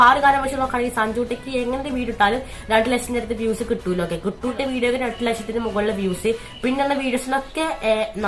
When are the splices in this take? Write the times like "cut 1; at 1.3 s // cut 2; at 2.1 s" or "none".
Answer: cut 1; at 4.5 s